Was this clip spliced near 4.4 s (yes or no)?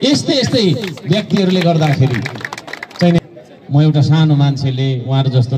no